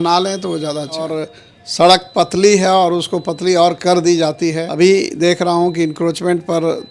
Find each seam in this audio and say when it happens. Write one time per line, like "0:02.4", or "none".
0:01.2
0:04.6